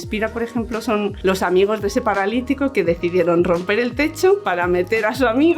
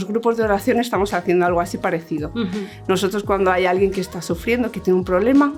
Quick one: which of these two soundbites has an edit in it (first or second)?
first